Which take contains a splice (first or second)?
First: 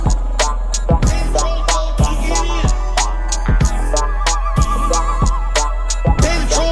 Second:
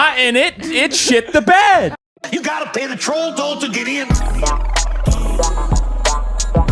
second